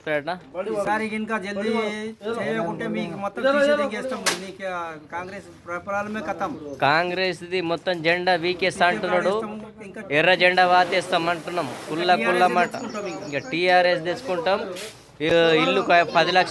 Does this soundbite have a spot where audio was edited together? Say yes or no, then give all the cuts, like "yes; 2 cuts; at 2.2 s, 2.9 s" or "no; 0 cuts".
no; 0 cuts